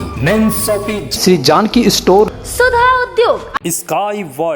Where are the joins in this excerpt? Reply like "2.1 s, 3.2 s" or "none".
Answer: 3.6 s